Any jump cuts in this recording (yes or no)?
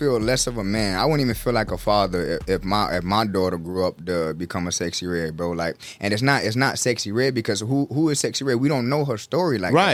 no